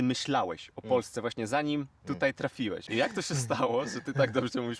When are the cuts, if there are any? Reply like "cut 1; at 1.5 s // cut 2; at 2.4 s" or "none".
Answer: cut 1; at 2.9 s